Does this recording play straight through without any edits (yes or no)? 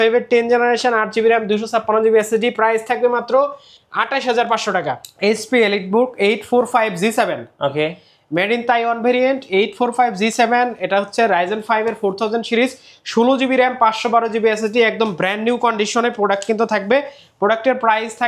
no